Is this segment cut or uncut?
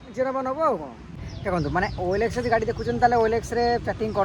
cut